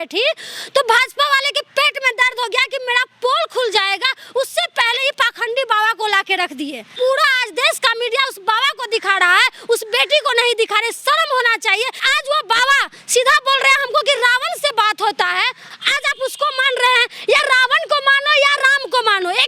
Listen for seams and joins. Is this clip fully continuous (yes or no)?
no